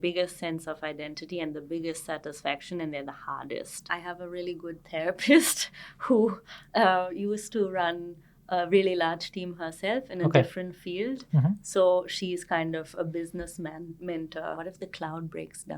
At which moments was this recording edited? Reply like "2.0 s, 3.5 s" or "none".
3.8 s, 14.6 s